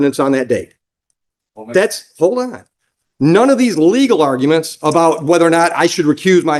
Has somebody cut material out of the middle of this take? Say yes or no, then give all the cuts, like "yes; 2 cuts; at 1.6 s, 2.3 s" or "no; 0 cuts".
no; 0 cuts